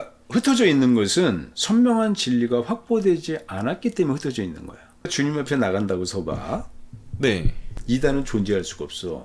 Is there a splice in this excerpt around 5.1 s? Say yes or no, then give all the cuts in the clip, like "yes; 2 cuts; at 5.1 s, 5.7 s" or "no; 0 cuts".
yes; 1 cut; at 5.1 s